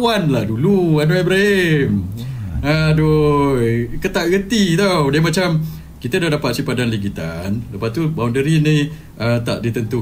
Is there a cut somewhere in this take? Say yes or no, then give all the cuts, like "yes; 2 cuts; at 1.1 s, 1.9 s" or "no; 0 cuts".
no; 0 cuts